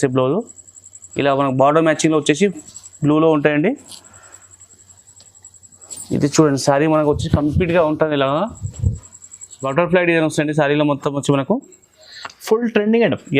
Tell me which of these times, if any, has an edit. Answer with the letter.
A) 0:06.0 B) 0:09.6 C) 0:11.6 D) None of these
B